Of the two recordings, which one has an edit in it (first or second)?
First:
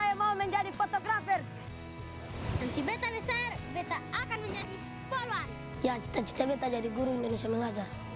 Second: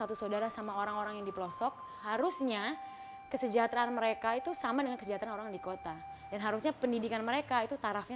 second